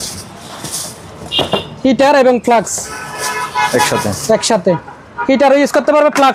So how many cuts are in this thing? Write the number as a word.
zero